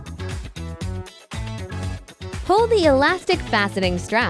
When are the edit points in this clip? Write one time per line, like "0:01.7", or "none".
0:01.4
0:02.4

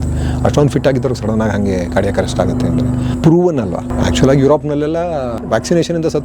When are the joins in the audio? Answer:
0:03.1
0:03.9
0:05.4

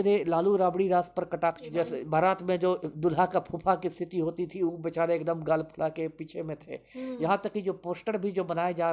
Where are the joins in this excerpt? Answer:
0:01.6

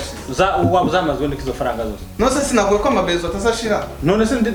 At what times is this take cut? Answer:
none

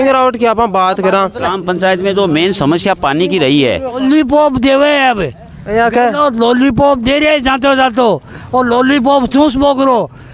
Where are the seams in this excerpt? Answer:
0:01.5
0:04.0

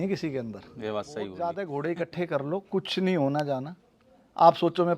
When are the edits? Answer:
0:01.4

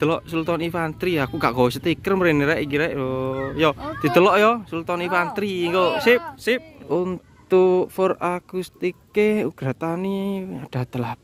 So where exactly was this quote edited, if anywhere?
0:06.7

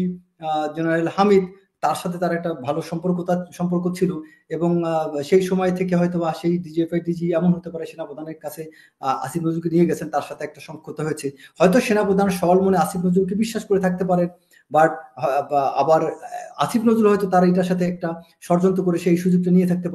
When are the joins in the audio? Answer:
none

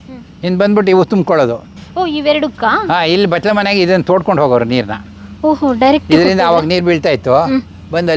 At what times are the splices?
none

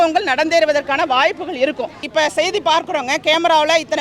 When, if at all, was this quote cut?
0:02.1

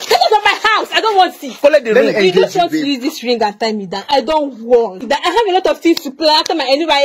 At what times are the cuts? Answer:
0:01.5

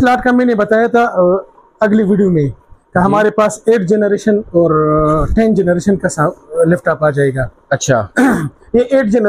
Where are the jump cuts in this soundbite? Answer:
none

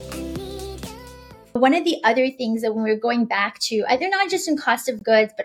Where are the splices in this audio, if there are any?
0:01.6

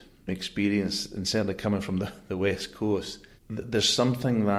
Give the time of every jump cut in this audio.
none

